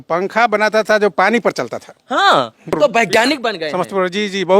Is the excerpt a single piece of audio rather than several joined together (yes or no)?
no